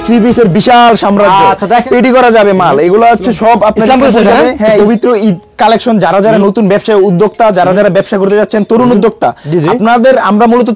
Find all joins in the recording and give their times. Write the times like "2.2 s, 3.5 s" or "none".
1.8 s, 4.8 s